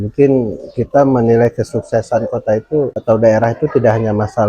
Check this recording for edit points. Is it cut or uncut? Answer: cut